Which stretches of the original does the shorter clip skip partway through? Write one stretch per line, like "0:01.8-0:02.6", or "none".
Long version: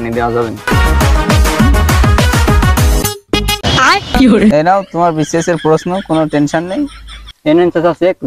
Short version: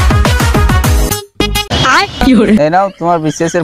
none

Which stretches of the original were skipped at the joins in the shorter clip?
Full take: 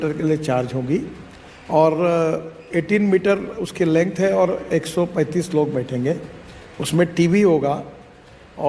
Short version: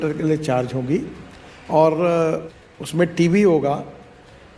0:02.5-0:06.5

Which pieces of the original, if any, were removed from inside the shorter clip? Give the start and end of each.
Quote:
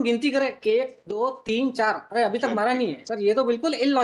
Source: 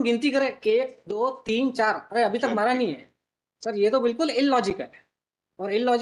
0:03.0-0:03.6

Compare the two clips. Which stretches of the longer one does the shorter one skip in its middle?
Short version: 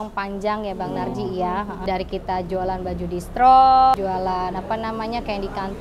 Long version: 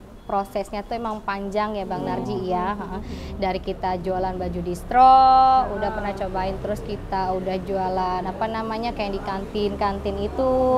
0:02.9-0:03.3
0:05.5-0:07.6

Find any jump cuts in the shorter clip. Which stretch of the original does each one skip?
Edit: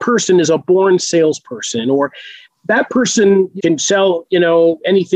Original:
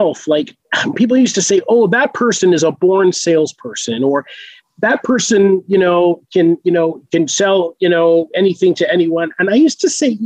0:05.6-0:07.0

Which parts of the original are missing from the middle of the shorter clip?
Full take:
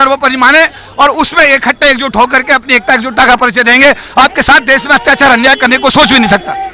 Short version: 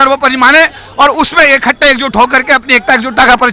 none

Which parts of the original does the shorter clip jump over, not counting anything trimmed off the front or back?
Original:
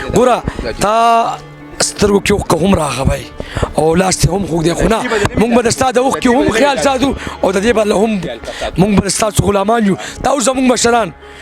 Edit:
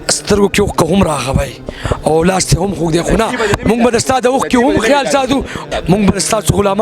0:07.3-0:08.4

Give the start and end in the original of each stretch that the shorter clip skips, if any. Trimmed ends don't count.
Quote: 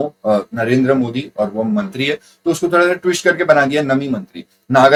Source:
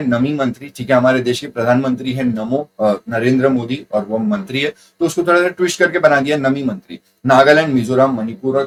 none

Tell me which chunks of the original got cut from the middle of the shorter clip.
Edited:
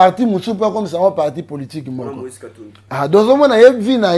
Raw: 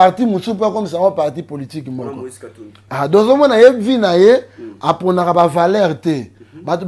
none

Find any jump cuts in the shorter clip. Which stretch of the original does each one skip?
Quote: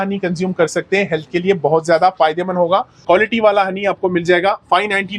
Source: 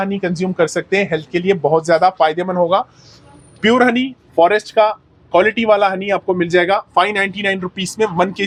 0:02.9-0:05.2

